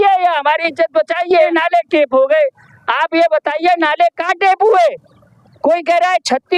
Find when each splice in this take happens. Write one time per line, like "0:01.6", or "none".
0:01.5